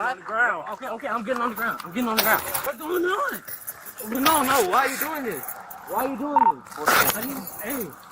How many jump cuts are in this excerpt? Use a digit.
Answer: 1